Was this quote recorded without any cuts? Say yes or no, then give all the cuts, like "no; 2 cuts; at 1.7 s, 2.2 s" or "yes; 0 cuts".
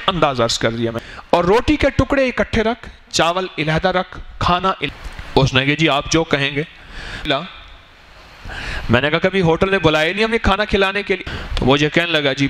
no; 4 cuts; at 1.1 s, 4.8 s, 7.3 s, 11.2 s